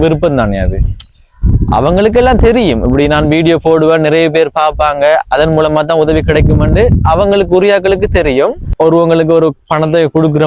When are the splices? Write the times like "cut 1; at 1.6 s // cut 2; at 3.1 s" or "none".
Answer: cut 1; at 8.7 s